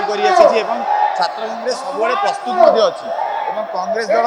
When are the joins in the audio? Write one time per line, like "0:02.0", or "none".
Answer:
none